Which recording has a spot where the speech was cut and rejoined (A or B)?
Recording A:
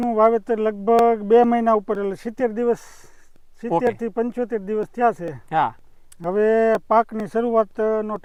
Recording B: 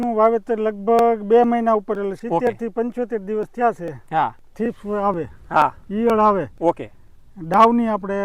B